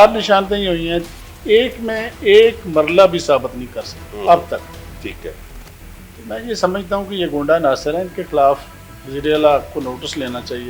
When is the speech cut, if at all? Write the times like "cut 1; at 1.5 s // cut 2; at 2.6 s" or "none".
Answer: none

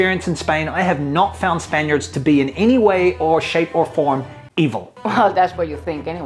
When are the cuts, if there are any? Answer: cut 1; at 4.9 s

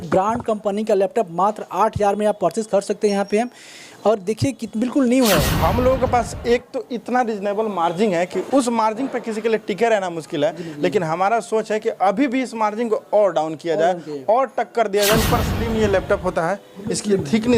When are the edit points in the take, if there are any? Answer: cut 1; at 5.5 s // cut 2; at 8.4 s // cut 3; at 15.2 s

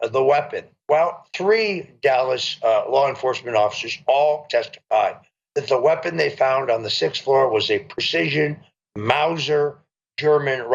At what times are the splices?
none

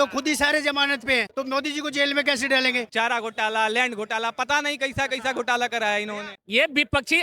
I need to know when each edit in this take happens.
cut 1; at 2.8 s // cut 2; at 6.3 s

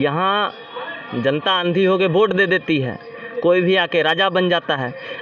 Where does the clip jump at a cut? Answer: none

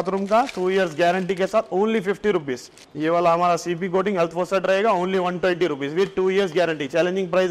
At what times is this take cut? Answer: none

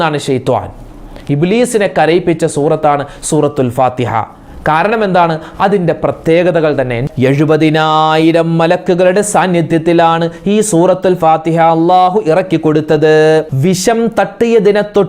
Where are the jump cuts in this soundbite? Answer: cut 1; at 7.1 s // cut 2; at 13.5 s

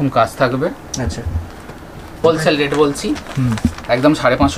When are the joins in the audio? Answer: cut 1; at 2.1 s

